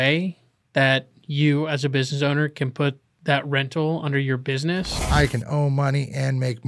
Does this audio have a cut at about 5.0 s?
yes; 1 cut; at 5.0 s

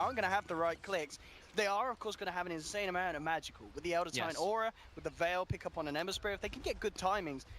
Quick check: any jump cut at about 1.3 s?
no; 1 cut; at 6.5 s

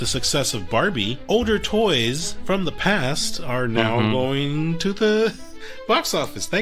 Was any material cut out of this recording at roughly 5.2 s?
no; 1 cut; at 1.2 s

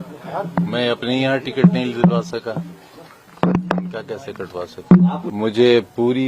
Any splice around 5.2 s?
yes; 1 cut; at 5.2 s

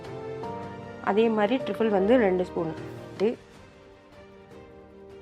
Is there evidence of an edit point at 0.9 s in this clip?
no; 0 cuts

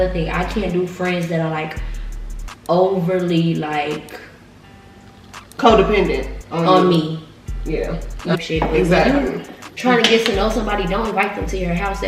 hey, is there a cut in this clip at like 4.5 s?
no; 1 cut; at 8.4 s

